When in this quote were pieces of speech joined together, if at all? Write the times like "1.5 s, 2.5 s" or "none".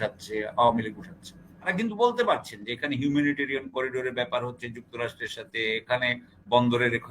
1.7 s